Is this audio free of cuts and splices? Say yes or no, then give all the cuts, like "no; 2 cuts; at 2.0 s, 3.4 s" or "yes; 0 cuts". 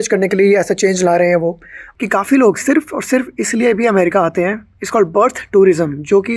no; 1 cut; at 1.8 s